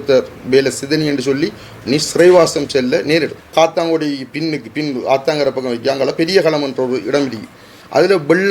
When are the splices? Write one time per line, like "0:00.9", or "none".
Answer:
0:03.5